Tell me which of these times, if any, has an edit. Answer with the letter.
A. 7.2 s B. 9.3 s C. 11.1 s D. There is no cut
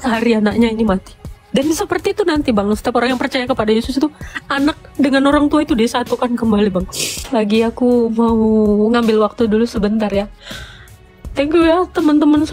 A